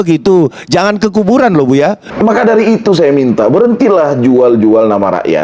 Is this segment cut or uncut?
cut